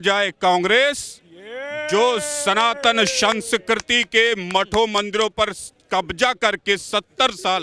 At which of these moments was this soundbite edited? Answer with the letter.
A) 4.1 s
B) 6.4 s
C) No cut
C